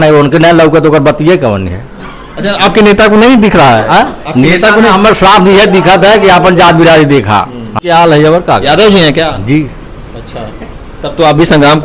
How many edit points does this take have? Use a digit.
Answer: 1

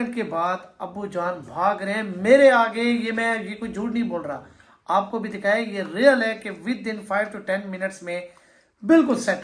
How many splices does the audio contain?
0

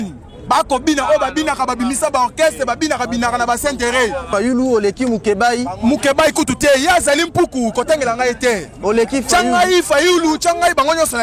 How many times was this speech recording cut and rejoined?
1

